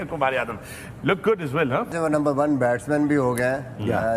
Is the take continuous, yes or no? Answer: no